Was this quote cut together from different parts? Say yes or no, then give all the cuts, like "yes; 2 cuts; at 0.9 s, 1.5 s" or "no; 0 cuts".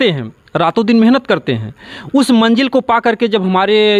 no; 0 cuts